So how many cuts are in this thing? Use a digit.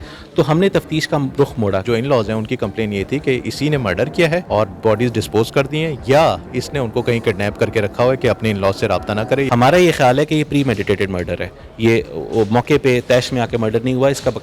3